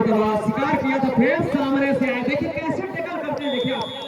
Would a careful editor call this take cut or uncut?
uncut